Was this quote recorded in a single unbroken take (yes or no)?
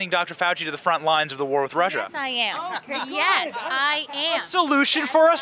yes